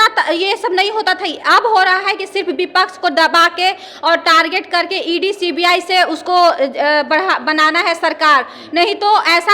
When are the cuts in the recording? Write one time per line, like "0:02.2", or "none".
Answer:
none